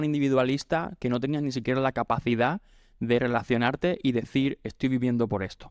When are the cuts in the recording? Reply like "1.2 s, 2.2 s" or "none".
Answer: none